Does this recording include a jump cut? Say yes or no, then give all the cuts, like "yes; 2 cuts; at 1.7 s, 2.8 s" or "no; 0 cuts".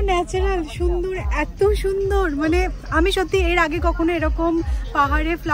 no; 0 cuts